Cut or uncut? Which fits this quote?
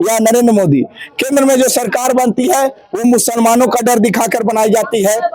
uncut